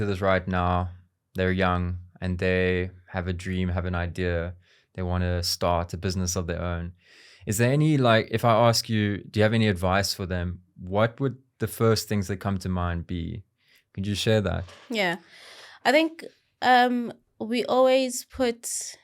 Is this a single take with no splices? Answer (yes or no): yes